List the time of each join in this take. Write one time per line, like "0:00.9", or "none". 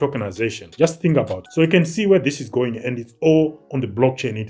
0:01.4